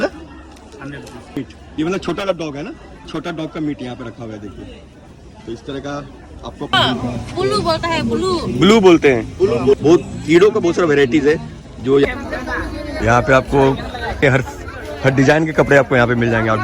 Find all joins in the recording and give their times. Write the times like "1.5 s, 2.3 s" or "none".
1.4 s, 6.7 s, 12.1 s